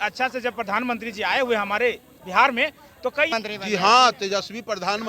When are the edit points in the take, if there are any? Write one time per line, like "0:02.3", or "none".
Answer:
0:03.3